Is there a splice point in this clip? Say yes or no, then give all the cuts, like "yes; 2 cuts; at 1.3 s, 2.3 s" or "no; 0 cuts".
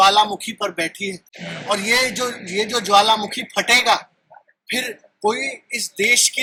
no; 0 cuts